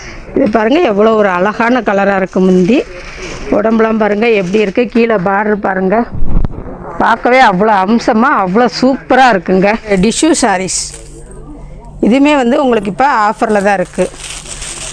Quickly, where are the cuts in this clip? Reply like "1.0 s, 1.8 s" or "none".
9.9 s